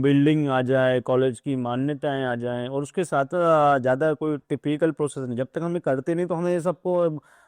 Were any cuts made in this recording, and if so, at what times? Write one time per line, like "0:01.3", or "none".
0:03.3